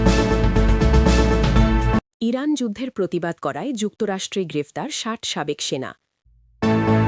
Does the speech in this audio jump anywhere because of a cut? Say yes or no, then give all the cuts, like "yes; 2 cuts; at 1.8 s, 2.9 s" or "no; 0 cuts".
yes; 1 cut; at 6.1 s